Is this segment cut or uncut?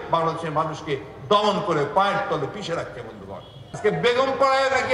cut